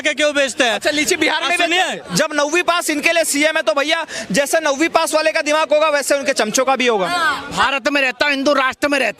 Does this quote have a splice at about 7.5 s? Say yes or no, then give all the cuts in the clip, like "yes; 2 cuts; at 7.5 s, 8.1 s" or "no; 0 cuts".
yes; 2 cuts; at 2.1 s, 7.5 s